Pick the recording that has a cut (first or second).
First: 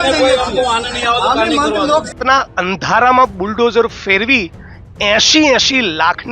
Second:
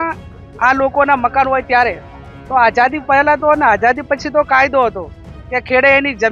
first